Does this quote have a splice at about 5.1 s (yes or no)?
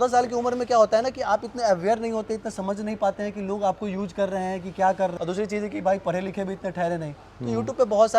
yes